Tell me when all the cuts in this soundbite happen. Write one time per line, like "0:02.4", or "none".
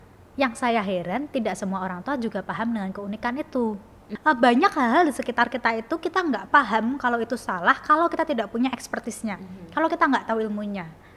0:04.0